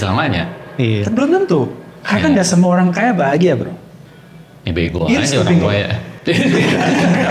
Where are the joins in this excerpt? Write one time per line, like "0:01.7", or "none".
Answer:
none

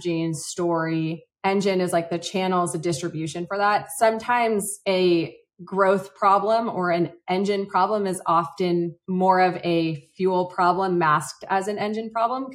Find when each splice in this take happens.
none

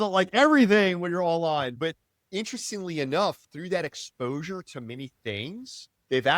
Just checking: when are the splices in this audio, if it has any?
0:01.7

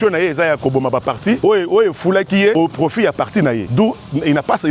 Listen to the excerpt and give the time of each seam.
0:01.4
0:02.5
0:03.6

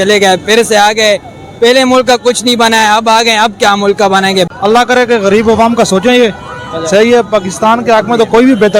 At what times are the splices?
0:04.5

